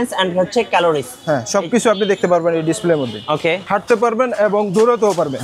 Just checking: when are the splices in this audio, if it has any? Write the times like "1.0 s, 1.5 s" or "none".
3.6 s